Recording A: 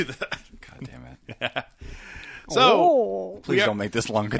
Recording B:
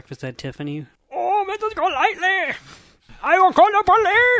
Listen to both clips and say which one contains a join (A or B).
B